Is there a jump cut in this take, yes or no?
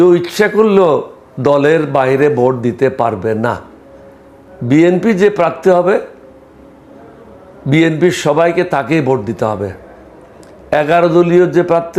no